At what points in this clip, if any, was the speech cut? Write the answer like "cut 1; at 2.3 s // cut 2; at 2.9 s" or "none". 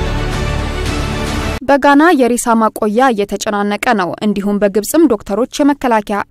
cut 1; at 1.6 s